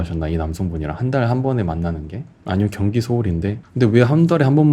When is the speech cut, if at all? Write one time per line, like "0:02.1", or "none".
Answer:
0:03.6